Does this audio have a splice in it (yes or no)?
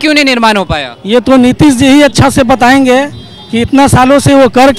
no